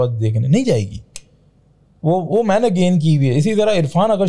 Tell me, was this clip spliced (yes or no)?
no